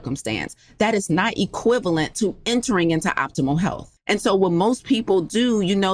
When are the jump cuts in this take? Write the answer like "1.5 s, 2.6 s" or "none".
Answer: 3.9 s